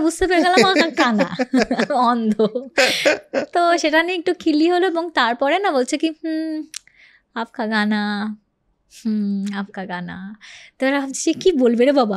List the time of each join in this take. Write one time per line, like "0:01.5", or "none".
none